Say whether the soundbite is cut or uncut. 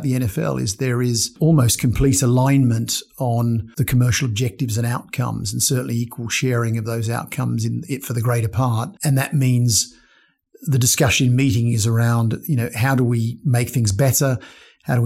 cut